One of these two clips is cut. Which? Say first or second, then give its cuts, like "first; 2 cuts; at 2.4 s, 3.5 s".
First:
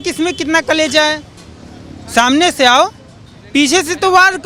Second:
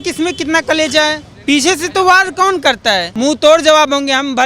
second; 2 cuts; at 1.3 s, 3.1 s